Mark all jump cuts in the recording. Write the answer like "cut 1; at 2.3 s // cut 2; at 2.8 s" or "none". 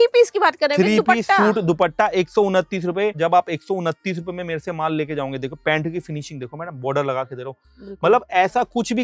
none